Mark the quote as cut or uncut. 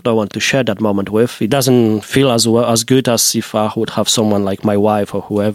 cut